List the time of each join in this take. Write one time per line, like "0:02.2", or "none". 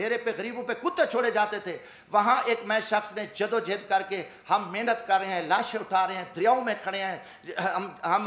none